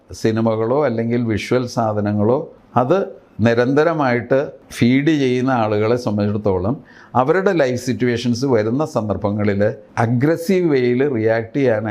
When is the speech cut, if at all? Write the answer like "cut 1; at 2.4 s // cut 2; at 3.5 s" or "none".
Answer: cut 1; at 2.6 s // cut 2; at 4.6 s // cut 3; at 9.8 s